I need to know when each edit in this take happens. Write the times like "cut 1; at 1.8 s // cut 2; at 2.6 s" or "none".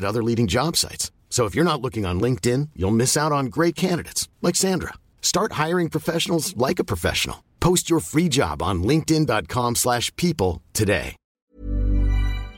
cut 1; at 11.4 s

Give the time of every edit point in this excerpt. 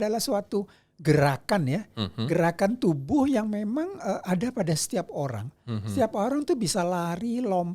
none

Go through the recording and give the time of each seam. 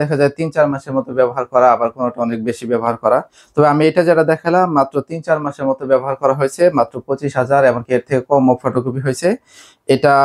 none

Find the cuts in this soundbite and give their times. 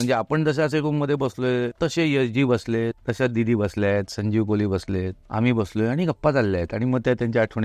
cut 1; at 1.7 s // cut 2; at 3.0 s // cut 3; at 5.2 s

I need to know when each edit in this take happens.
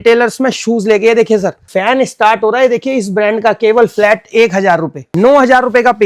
cut 1; at 1.6 s // cut 2; at 5.0 s

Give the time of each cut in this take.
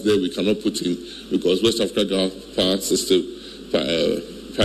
none

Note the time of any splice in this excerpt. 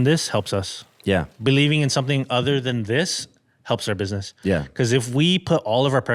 none

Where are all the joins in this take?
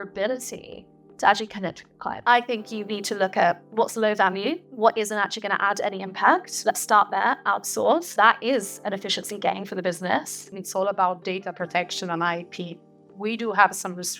cut 1; at 2.1 s // cut 2; at 4.7 s // cut 3; at 6.5 s // cut 4; at 8.1 s // cut 5; at 10.6 s

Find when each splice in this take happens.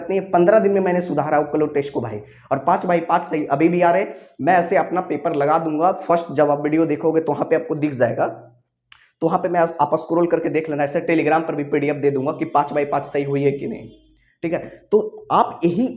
none

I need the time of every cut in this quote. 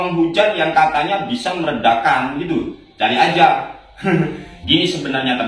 cut 1; at 4.5 s

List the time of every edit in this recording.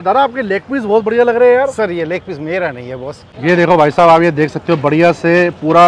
cut 1; at 3.3 s

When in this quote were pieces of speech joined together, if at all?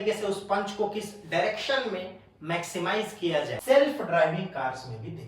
cut 1; at 3.6 s

